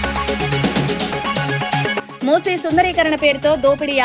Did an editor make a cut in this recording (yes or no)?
yes